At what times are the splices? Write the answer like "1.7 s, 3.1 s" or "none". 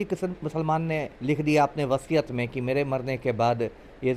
1.1 s